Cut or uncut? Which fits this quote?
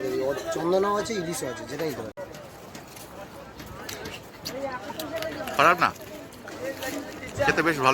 cut